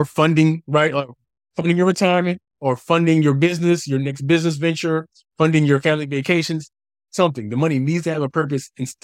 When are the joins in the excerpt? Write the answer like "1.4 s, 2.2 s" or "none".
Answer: none